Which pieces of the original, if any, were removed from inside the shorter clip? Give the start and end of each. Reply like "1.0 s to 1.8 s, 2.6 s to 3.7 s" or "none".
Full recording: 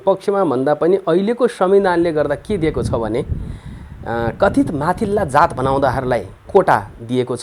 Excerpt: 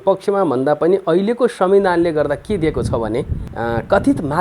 3.4 s to 3.9 s